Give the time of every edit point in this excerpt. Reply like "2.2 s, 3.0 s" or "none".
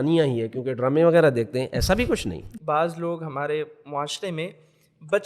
2.5 s